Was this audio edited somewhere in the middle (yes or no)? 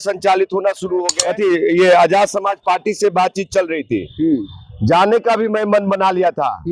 yes